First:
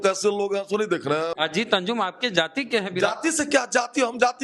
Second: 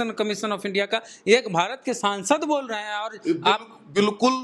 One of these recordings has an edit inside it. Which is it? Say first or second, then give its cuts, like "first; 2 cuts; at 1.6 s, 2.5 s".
first; 1 cut; at 1.3 s